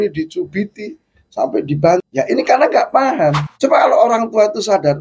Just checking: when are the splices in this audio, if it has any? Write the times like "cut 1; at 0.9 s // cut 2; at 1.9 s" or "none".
cut 1; at 2.1 s // cut 2; at 3.5 s

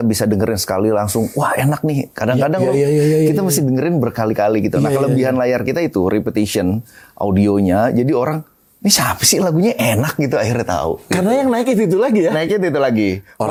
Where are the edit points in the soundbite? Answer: none

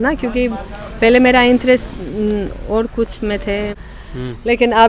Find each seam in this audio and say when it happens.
cut 1; at 3.8 s

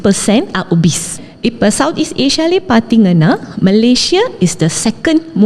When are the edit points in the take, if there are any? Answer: cut 1; at 1.2 s

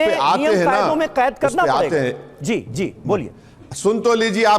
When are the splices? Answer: none

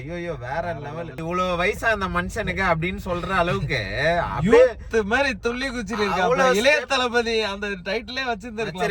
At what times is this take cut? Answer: cut 1; at 1.2 s

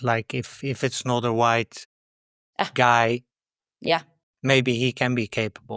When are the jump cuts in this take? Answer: none

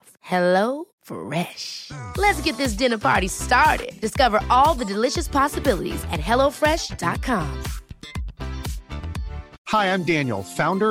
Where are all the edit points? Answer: cut 1; at 9.5 s

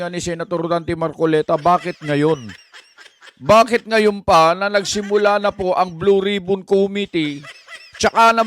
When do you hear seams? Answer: none

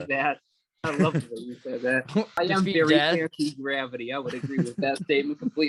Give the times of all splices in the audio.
cut 1; at 2.4 s

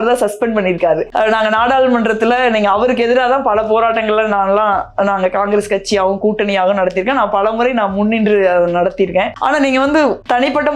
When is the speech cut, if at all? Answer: cut 1; at 9.3 s

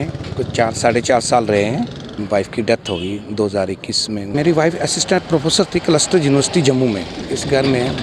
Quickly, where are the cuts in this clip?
cut 1; at 2.2 s // cut 2; at 4.3 s // cut 3; at 7.2 s

